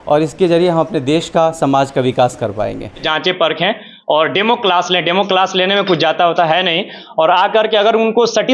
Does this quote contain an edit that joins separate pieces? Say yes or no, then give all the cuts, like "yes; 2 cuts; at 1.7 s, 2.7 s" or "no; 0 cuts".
yes; 1 cut; at 3.0 s